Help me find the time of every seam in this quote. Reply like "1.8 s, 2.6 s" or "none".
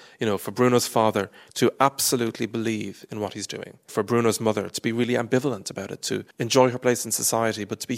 6.3 s

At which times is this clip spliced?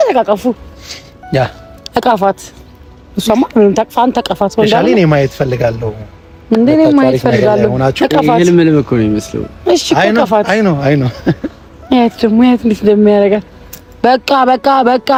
none

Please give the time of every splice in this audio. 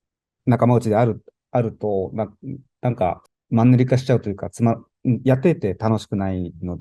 3.3 s

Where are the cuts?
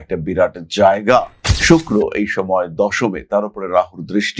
1.4 s

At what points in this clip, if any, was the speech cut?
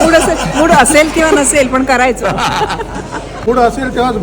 3.3 s

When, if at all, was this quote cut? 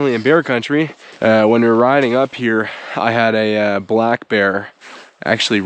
1.0 s

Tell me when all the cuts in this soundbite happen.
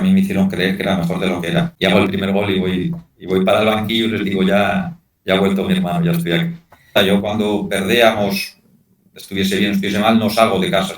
1.7 s, 7.0 s

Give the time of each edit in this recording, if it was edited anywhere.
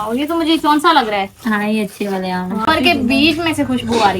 2.7 s

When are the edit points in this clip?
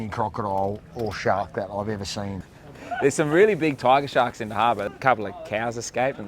2.4 s, 4.8 s

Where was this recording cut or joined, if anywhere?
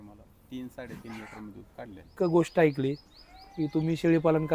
2.1 s

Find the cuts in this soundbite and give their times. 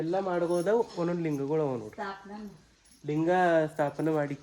none

